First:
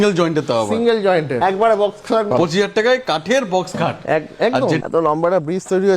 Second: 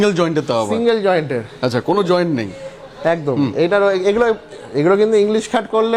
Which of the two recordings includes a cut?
first; 3 cuts; at 1.4 s, 2.3 s, 4.8 s

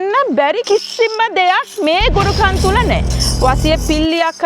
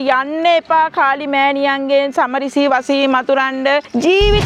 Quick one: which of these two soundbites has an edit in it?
first; 1 cut; at 3.0 s

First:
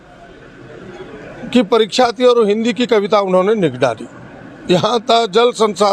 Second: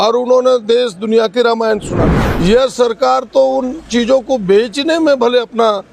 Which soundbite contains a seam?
second; 1 cut; at 2.1 s

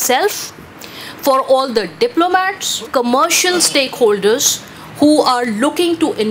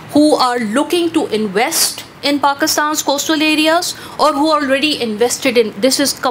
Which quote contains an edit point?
first; 1 cut; at 2.9 s

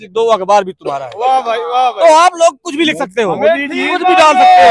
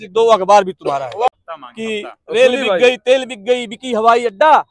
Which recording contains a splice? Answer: second; 1 cut; at 1.3 s

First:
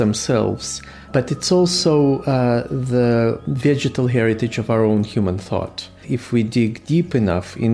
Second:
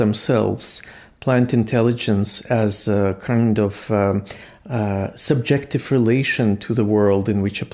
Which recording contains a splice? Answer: first; 2 cuts; at 1.1 s, 6.0 s

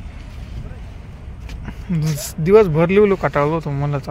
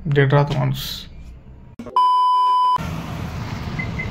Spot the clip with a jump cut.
second; 1 cut; at 2.8 s

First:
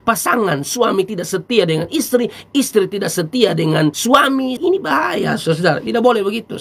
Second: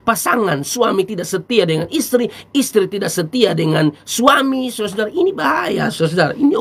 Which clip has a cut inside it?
first; 2 cuts; at 4.1 s, 5.8 s

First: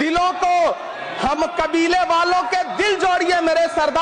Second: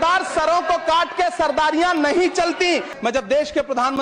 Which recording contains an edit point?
second; 1 cut; at 2.9 s

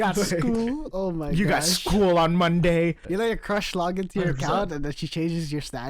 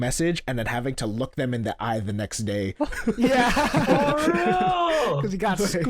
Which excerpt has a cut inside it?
first; 1 cut; at 3.0 s

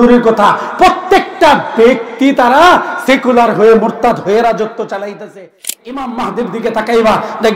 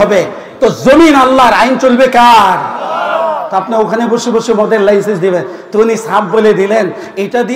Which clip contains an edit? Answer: first; 1 cut; at 5.7 s

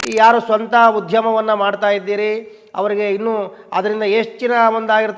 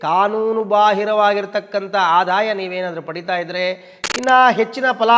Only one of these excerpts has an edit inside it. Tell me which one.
second; 1 cut; at 3.9 s

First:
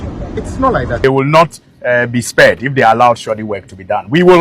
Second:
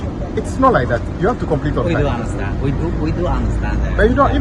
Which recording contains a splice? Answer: first; 1 cut; at 1.0 s

